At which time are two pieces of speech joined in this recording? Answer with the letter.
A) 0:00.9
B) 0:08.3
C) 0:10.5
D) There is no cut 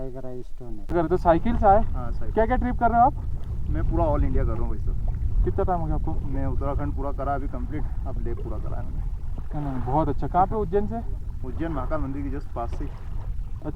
A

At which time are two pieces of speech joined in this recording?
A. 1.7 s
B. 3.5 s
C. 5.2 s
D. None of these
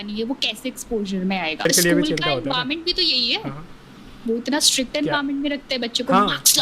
A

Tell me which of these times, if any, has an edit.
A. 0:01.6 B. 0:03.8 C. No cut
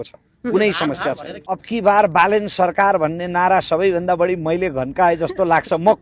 A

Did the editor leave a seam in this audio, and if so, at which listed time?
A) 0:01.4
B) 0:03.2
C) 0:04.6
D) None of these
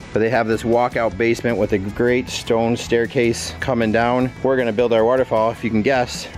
D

